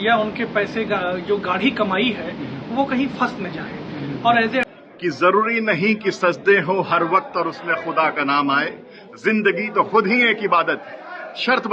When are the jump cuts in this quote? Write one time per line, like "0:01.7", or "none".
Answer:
0:04.7